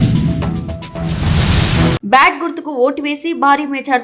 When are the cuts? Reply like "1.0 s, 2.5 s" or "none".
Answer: none